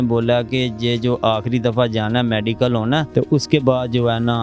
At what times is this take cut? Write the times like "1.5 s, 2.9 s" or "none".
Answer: 3.1 s